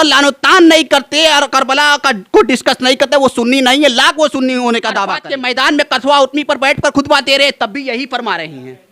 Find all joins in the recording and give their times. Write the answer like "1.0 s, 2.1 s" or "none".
5.0 s